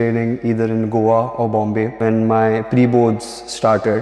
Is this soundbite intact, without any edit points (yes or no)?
no